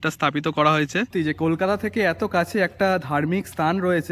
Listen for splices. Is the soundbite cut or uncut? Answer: cut